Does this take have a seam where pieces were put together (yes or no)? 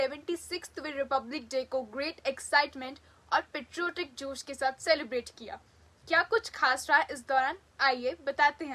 no